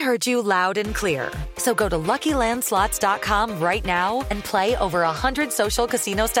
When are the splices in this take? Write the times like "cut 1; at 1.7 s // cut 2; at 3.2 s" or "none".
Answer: none